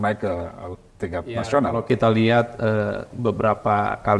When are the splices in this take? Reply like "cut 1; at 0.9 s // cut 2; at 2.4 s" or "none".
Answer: none